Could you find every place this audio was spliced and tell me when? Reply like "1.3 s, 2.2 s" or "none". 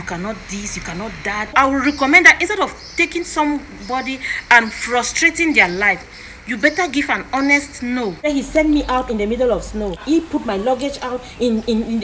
1.5 s, 8.3 s, 10.0 s